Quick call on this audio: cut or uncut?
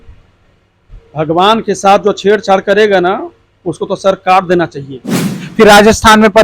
cut